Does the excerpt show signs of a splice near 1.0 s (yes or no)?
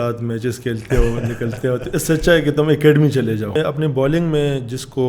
no